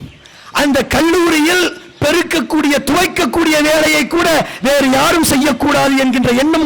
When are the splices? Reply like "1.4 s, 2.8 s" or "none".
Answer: none